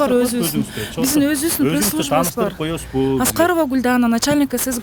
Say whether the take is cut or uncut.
uncut